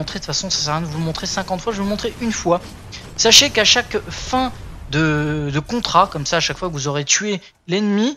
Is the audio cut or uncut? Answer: uncut